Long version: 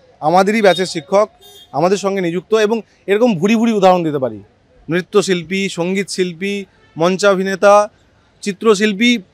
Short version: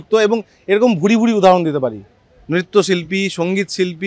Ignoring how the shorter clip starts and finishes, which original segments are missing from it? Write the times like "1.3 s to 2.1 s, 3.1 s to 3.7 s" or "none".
none